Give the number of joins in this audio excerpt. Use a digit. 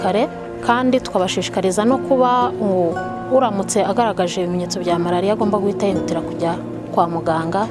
1